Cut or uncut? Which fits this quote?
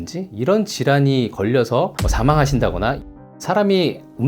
cut